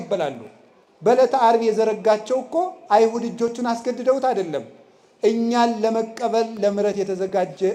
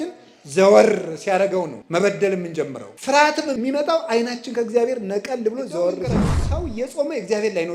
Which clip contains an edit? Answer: second; 4 cuts; at 1.8 s, 2.9 s, 3.6 s, 6.4 s

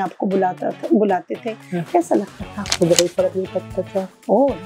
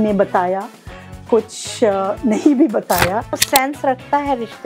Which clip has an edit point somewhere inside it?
second; 1 cut; at 3.4 s

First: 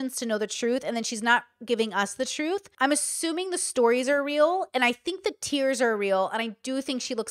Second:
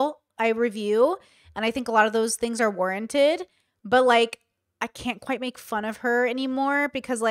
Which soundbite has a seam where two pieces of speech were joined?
first; 1 cut; at 2.7 s

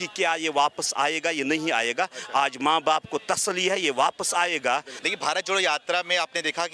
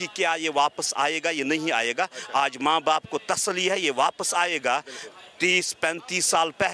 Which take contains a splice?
first; 1 cut; at 5.0 s

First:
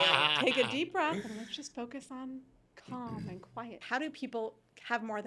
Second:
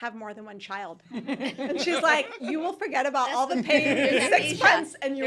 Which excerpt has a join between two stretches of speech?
first; 1 cut; at 3.8 s

